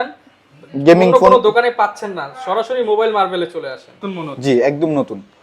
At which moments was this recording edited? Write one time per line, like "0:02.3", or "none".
0:04.0